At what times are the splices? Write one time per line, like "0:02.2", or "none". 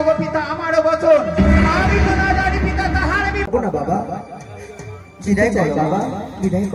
0:03.5